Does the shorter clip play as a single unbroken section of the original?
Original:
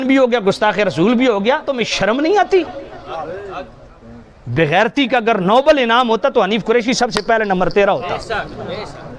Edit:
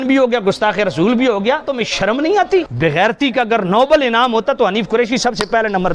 no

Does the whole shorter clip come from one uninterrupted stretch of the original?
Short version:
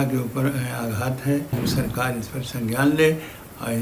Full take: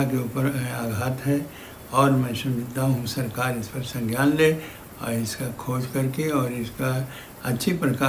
no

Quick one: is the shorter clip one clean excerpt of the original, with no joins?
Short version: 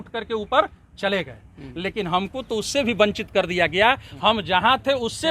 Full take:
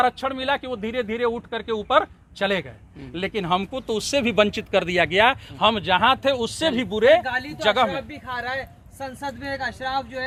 yes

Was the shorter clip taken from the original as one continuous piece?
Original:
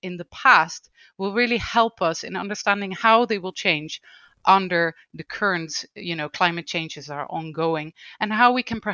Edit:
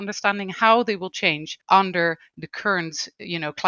no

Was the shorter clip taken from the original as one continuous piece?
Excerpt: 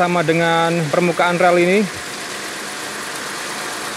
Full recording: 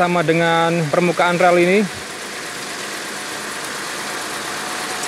no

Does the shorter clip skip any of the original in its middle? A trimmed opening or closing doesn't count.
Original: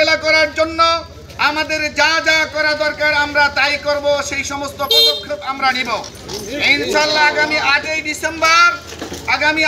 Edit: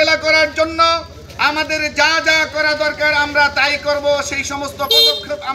no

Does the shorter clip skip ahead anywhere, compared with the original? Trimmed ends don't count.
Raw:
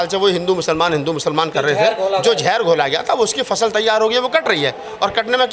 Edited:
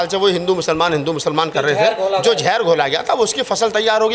no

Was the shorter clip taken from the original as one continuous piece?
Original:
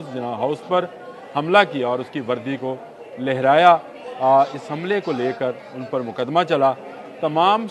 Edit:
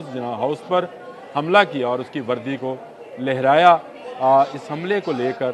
yes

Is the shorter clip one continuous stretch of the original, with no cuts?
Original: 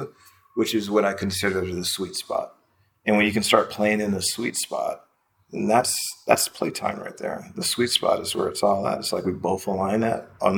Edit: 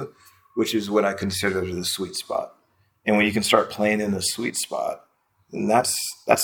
yes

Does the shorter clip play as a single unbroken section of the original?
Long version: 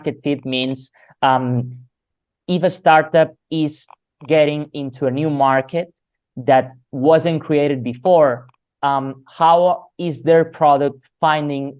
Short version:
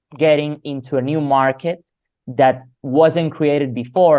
yes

